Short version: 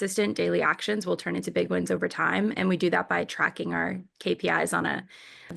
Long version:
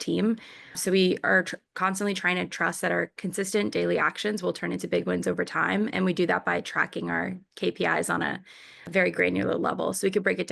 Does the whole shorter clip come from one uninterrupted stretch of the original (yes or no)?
yes